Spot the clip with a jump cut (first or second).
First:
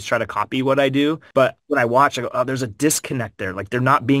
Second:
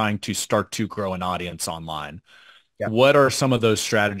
first